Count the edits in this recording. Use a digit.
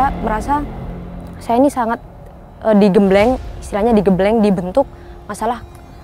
0